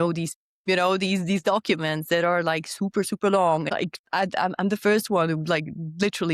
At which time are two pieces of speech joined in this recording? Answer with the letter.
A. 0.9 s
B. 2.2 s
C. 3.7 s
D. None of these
C